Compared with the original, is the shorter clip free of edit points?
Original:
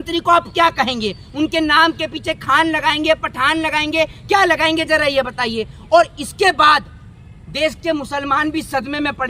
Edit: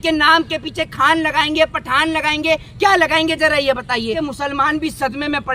no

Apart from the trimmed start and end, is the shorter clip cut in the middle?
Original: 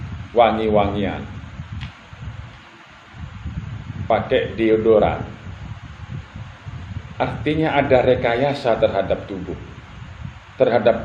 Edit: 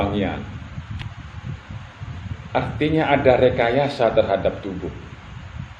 yes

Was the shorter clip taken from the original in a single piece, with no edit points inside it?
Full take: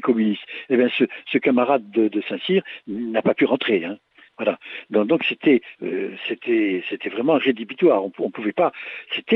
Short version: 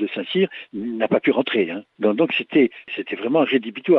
no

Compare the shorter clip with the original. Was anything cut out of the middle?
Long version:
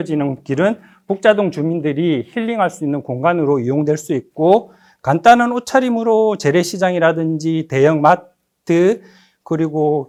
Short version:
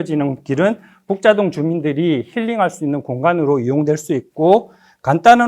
no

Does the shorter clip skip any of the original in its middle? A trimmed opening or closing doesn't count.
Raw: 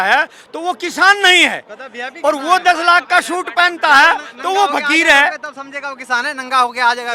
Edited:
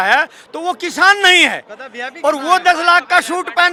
no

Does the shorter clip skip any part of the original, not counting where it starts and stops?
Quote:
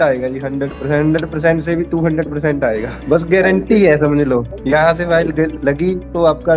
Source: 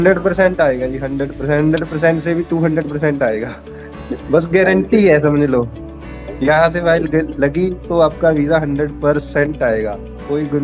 yes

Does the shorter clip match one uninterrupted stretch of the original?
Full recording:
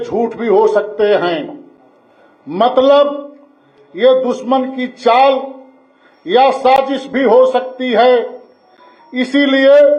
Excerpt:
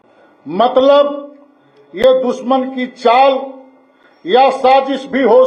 yes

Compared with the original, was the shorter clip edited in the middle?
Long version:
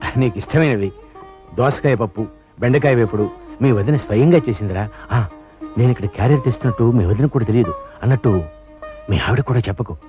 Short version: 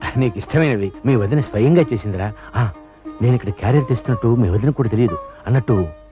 yes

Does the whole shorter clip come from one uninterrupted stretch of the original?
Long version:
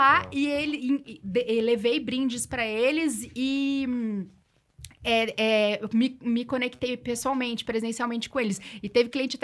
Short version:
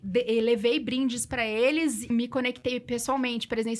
no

